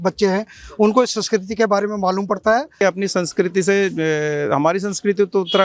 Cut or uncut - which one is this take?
cut